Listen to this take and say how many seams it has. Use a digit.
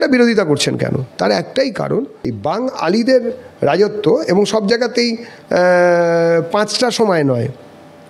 1